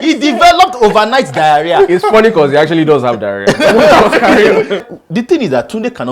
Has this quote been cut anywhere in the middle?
yes; 1 cut; at 4.8 s

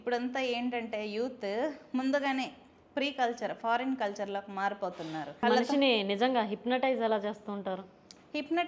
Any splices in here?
yes; 1 cut; at 5.4 s

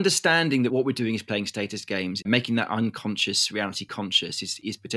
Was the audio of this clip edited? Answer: yes; 2 cuts; at 0.7 s, 2.2 s

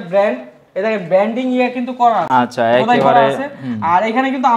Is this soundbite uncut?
yes; 0 cuts

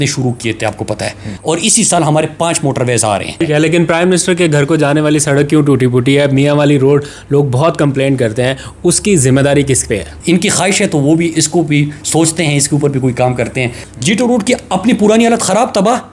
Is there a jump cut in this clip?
yes; 4 cuts; at 1.3 s, 3.4 s, 10.1 s, 13.9 s

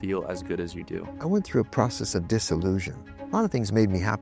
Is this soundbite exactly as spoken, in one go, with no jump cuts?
no; 2 cuts; at 1.1 s, 3.1 s

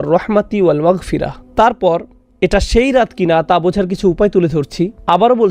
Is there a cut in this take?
yes; 1 cut; at 1.4 s

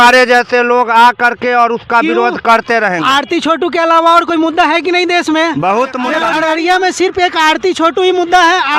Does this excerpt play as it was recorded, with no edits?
no; 1 cut; at 6.3 s

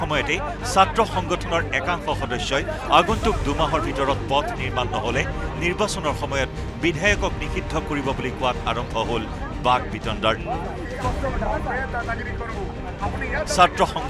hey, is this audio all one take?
yes; 0 cuts

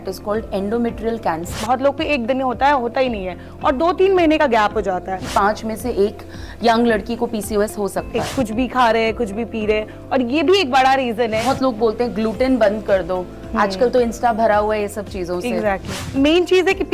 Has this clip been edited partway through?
yes; 5 cuts; at 1.6 s, 5.2 s, 8.2 s, 11.4 s, 16.0 s

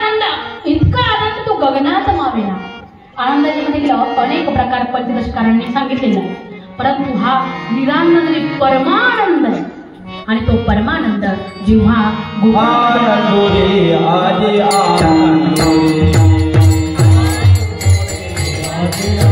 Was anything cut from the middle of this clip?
no; 0 cuts

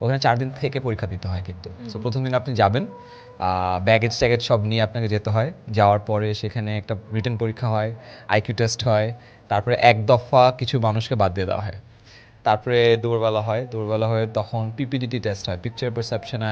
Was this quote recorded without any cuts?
yes; 0 cuts

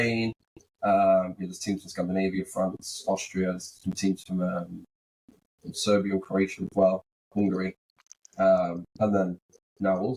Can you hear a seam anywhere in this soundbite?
no; 0 cuts

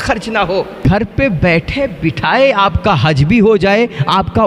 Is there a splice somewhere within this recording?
no; 0 cuts

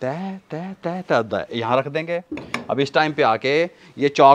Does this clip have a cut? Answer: no; 0 cuts

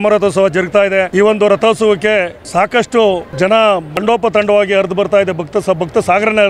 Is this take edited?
yes; 4 cuts; at 1.1 s, 2.4 s, 3.3 s, 3.9 s

